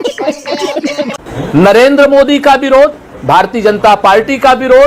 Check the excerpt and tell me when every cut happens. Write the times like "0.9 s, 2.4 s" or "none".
1.2 s